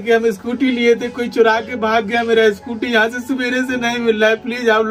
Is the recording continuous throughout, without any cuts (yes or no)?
yes